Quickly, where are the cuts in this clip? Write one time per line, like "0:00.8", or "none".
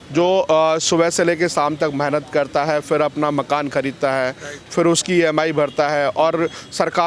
none